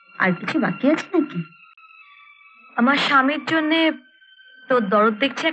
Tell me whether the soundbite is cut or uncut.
uncut